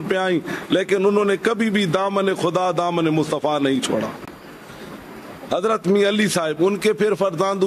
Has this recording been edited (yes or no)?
no